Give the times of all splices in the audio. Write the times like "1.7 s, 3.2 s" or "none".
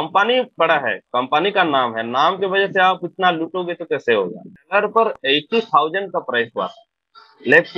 4.5 s